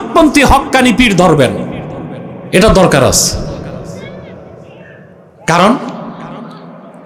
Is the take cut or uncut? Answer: uncut